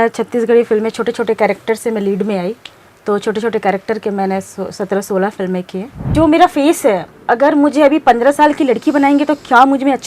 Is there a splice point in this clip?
yes; 1 cut; at 6.1 s

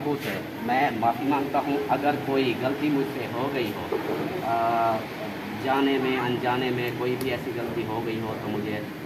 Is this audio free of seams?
yes; 0 cuts

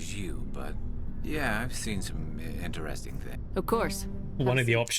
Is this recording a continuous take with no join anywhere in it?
no; 1 cut; at 3.4 s

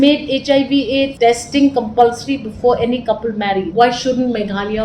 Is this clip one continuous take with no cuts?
no; 2 cuts; at 1.1 s, 3.7 s

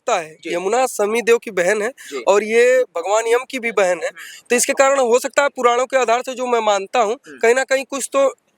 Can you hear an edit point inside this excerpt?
no; 0 cuts

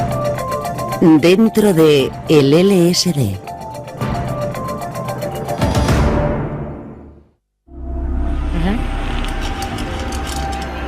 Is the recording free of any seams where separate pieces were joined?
no; 1 cut; at 2.6 s

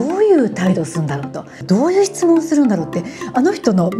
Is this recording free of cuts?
no; 1 cut; at 1.6 s

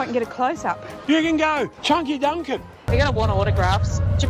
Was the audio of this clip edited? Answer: yes; 3 cuts; at 0.9 s, 1.8 s, 2.8 s

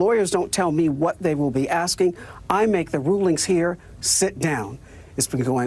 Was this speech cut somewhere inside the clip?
no; 0 cuts

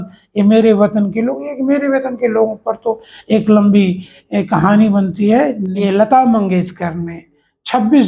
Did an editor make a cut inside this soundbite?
yes; 1 cut; at 5.8 s

